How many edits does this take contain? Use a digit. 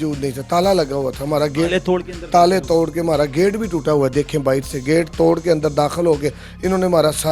0